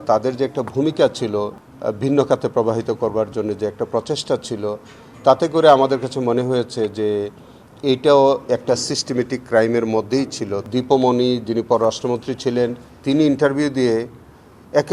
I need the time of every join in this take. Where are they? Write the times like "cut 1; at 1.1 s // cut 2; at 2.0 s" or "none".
cut 1; at 1.6 s // cut 2; at 10.6 s